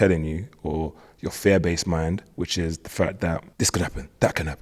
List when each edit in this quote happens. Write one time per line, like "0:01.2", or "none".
0:03.5